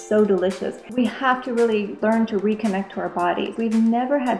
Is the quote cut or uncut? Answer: cut